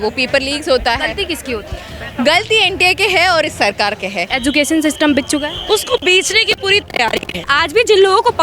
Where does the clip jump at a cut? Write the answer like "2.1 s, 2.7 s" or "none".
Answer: 4.2 s, 7.5 s